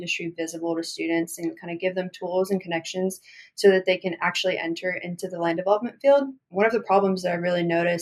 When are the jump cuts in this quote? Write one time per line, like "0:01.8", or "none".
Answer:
0:06.5